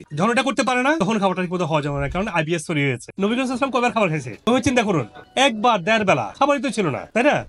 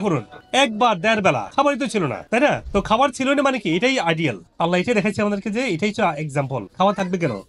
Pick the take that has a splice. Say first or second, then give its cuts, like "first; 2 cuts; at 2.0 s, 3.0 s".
first; 1 cut; at 3.1 s